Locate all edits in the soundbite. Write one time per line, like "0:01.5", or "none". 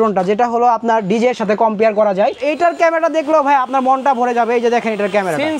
0:02.4